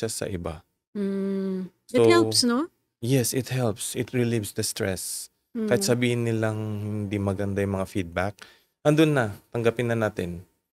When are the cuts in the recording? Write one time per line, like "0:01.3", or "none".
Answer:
none